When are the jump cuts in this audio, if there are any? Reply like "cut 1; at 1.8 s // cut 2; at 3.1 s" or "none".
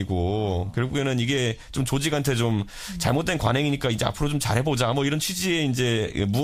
cut 1; at 2.4 s